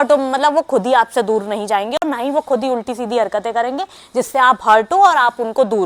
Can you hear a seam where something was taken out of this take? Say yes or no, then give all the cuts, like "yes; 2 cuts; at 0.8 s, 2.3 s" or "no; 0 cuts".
no; 0 cuts